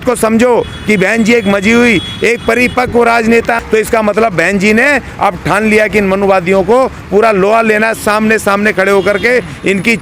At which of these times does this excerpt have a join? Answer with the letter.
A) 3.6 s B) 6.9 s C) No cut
A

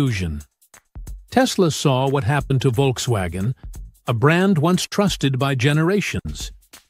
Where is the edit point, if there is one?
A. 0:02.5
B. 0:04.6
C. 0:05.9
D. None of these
A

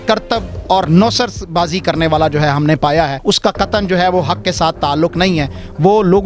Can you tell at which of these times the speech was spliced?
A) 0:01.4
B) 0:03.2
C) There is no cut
B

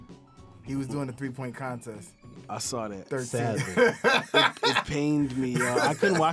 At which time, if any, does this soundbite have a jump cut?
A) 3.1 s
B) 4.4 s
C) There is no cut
C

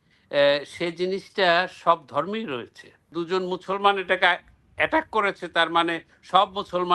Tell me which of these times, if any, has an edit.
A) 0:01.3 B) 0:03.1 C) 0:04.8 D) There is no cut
B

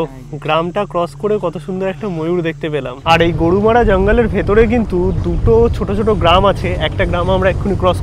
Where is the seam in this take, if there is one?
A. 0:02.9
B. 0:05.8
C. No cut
A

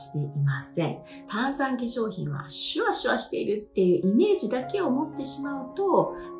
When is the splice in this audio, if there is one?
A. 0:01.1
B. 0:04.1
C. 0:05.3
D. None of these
A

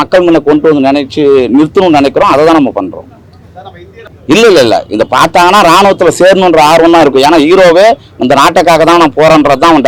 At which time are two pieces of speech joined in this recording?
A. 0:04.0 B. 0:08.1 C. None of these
A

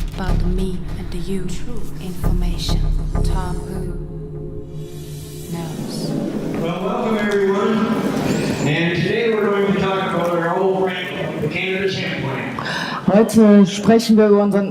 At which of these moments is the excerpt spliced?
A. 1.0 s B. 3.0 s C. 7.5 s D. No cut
B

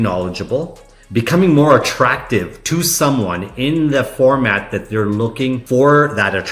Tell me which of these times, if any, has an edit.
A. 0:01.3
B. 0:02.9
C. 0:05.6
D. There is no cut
C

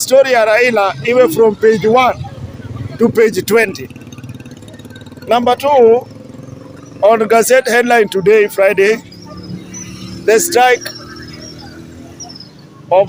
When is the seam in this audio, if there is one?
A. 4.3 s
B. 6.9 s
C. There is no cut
C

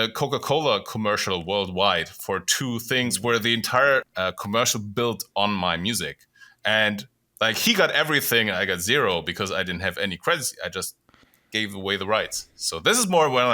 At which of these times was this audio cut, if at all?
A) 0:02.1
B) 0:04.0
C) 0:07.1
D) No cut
B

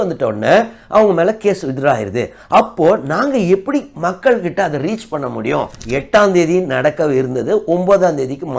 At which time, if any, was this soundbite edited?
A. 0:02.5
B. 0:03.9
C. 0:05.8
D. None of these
C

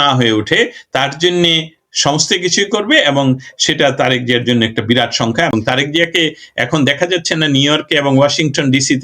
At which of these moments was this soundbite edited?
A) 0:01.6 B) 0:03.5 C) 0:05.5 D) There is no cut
C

